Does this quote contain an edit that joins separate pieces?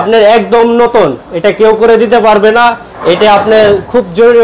no; 0 cuts

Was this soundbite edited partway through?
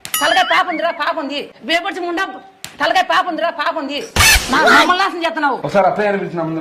yes; 3 cuts; at 1.5 s, 4.0 s, 5.6 s

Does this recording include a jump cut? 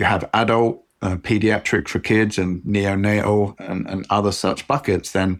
no; 0 cuts

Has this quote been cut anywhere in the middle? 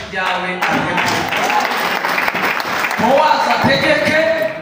no; 0 cuts

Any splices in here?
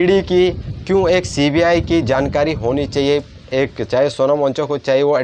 no; 0 cuts

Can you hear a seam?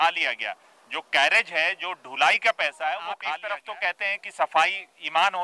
yes; 1 cut; at 3.2 s

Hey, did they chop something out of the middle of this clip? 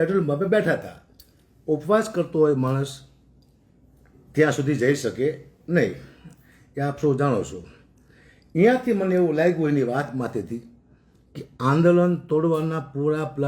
no; 0 cuts

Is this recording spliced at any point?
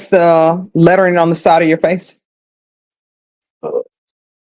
no; 0 cuts

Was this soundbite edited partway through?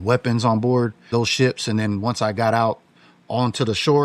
yes; 1 cut; at 1.0 s

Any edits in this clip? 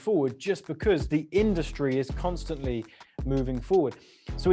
no; 0 cuts

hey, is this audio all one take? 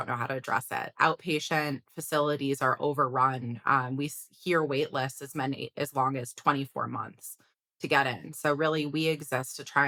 yes; 0 cuts

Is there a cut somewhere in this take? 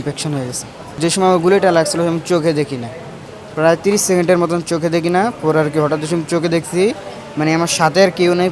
yes; 1 cut; at 1.0 s

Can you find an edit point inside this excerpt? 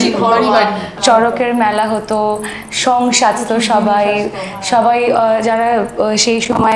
yes; 1 cut; at 0.9 s

